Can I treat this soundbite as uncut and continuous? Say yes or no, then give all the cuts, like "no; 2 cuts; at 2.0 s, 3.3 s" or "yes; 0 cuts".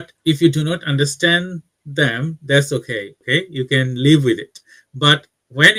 yes; 0 cuts